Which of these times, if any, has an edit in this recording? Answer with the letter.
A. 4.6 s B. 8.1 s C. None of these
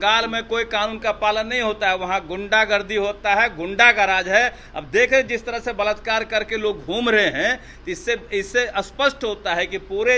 C